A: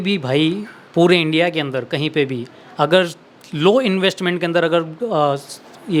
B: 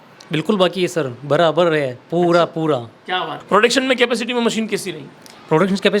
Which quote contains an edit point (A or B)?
B